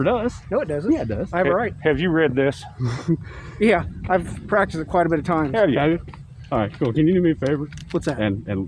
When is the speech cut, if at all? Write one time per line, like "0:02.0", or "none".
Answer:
none